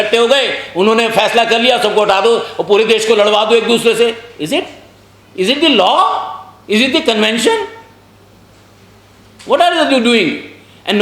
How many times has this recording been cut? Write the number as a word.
zero